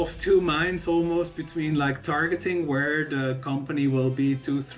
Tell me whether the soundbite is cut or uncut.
uncut